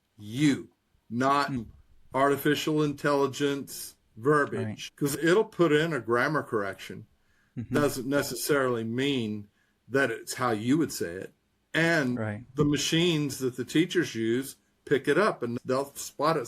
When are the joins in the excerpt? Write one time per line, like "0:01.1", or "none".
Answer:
0:01.6
0:04.8
0:07.5
0:12.2